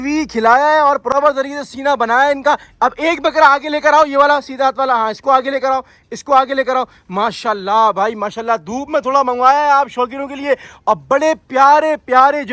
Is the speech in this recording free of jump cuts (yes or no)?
yes